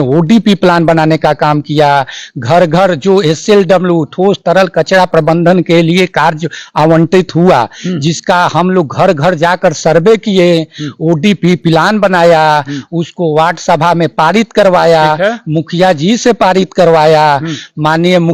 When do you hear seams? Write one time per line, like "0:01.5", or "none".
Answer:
none

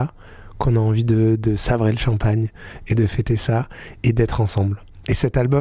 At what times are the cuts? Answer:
none

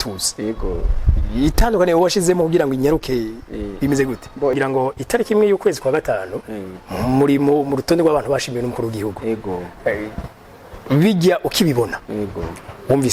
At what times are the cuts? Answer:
0:04.6

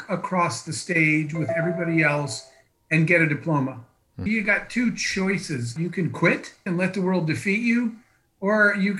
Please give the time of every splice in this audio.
0:04.2
0:05.7
0:06.7

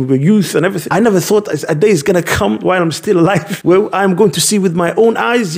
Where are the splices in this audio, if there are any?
0:00.8
0:03.5

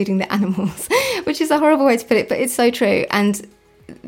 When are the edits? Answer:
none

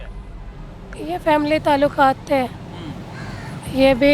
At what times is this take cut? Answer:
none

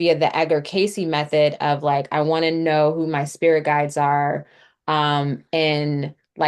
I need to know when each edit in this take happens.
none

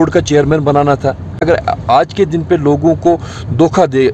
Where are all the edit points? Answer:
0:01.5

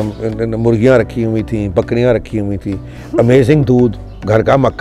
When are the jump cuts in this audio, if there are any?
none

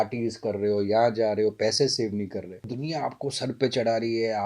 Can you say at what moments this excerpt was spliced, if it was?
0:02.8

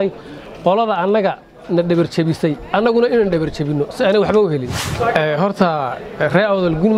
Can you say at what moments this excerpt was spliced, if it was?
0:04.8

